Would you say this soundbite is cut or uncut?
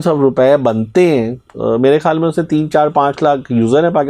uncut